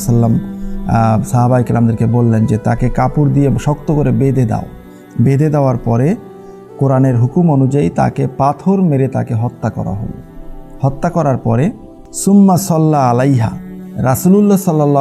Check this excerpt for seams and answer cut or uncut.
uncut